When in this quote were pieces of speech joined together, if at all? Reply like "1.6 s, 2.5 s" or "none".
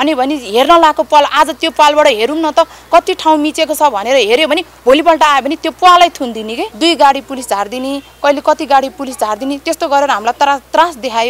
6.6 s